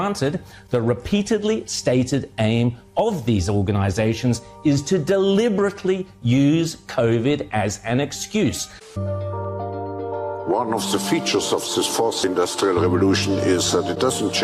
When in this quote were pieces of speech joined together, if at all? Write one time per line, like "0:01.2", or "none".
0:08.9